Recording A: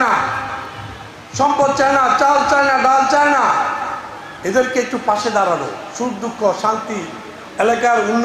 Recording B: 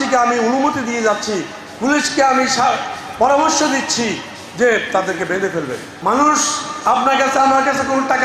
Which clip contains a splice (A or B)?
B